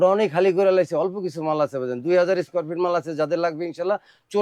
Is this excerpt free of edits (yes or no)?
yes